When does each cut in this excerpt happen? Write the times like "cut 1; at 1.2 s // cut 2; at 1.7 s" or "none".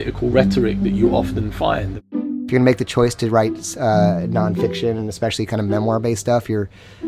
cut 1; at 2.1 s

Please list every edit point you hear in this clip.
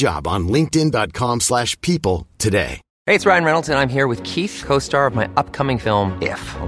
cut 1; at 2.9 s

